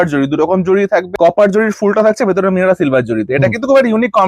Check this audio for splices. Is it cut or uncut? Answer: cut